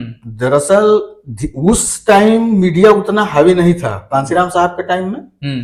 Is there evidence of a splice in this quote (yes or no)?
no